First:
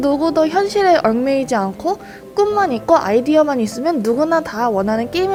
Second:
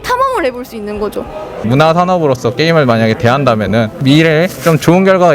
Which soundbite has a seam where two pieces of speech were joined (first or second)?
second